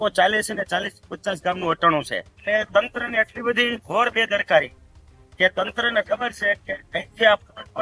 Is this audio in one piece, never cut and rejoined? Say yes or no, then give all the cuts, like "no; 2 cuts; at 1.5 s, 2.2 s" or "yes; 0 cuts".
no; 1 cut; at 2.2 s